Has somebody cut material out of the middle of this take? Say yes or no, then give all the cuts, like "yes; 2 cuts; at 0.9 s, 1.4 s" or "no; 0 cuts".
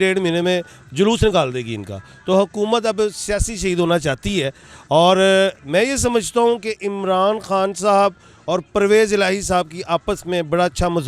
no; 0 cuts